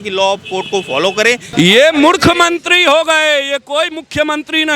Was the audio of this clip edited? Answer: yes; 1 cut; at 1.5 s

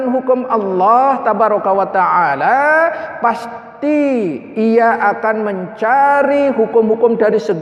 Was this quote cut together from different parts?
no; 0 cuts

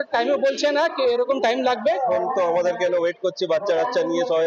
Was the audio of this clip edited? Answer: yes; 1 cut; at 2.1 s

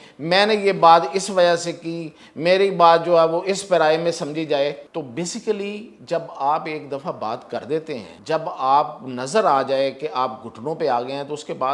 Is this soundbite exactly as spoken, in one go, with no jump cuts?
no; 2 cuts; at 4.8 s, 8.1 s

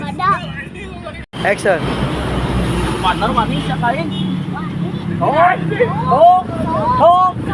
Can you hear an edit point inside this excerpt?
no; 0 cuts

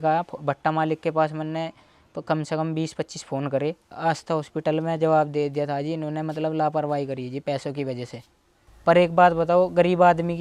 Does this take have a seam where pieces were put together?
yes; 2 cuts; at 3.9 s, 8.3 s

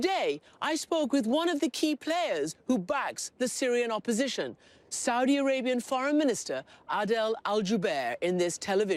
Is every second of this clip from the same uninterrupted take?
no; 1 cut; at 2.5 s

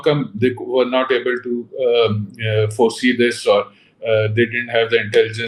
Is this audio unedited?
yes; 0 cuts

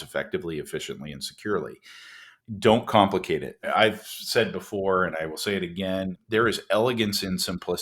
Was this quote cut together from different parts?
yes; 2 cuts; at 2.3 s, 3.7 s

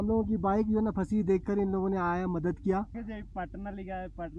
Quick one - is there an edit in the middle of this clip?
yes; 1 cut; at 2.9 s

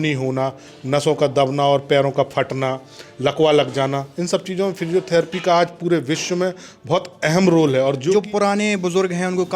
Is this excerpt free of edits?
no; 1 cut; at 8.1 s

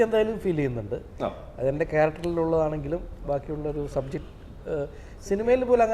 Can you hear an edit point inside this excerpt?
no; 0 cuts

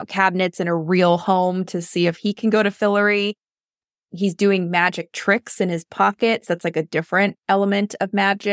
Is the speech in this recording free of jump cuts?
yes; 0 cuts

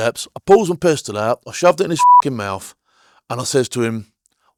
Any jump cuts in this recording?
no; 0 cuts

